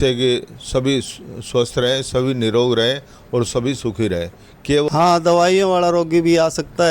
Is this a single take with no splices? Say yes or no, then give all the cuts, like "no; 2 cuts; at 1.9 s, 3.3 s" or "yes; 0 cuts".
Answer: no; 1 cut; at 4.9 s